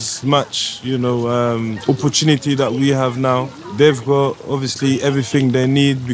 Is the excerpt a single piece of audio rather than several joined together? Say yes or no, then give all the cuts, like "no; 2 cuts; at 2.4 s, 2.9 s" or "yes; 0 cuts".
yes; 0 cuts